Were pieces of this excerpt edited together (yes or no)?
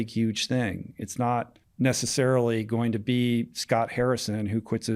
yes